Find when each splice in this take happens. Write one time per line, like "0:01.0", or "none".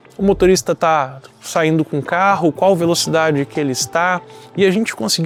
none